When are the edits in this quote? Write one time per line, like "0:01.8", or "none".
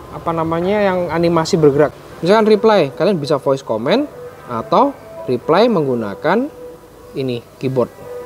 0:01.9

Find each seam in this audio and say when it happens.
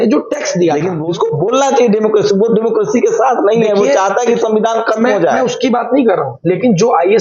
0:00.9

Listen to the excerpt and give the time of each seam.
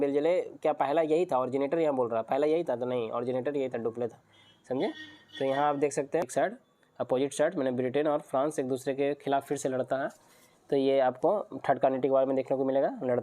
0:06.2

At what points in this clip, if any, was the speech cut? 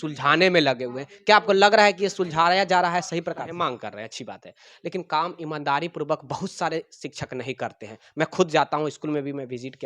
0:03.5

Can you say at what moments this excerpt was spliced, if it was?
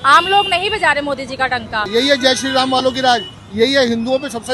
0:01.9

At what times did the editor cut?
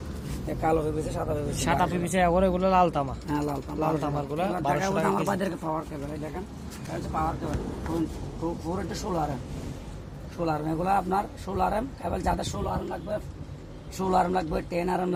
none

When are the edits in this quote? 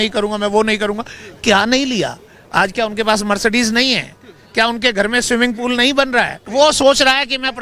0:06.4

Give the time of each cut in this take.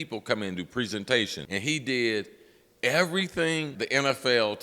0:01.4
0:03.8

